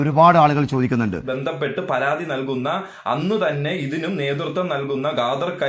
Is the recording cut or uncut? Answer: cut